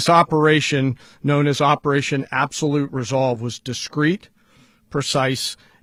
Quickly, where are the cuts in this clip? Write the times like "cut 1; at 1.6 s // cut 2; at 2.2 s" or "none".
none